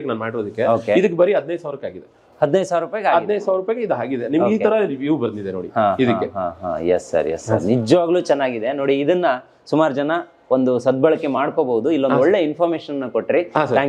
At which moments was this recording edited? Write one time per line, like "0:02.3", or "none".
none